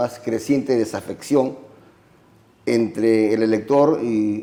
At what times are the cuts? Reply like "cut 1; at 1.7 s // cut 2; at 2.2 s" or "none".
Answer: none

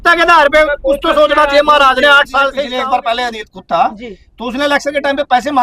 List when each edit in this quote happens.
cut 1; at 2.6 s

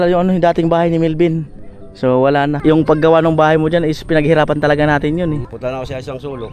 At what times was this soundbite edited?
cut 1; at 2.6 s // cut 2; at 5.5 s

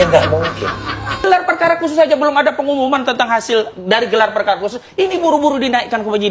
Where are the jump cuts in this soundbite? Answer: cut 1; at 1.2 s

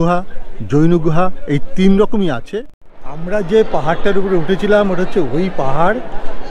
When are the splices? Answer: cut 1; at 2.4 s

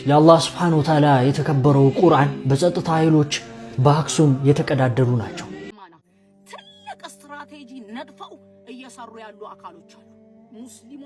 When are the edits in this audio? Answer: cut 1; at 5.6 s

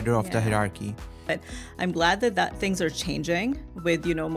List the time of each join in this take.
cut 1; at 1.3 s

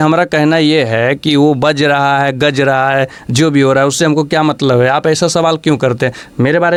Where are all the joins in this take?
none

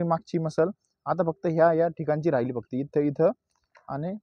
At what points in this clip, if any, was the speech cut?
none

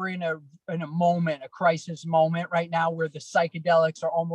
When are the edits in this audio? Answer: none

